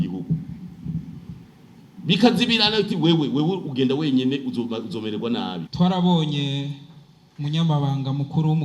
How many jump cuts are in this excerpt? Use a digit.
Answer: 1